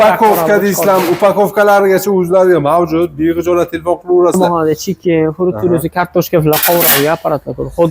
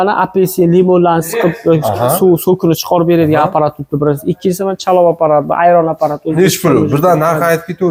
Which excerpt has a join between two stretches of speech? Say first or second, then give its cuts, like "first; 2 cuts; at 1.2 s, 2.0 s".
first; 1 cut; at 4.4 s